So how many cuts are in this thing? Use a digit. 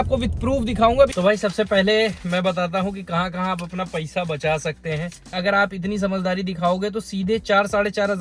2